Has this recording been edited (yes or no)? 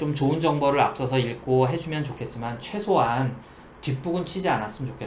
no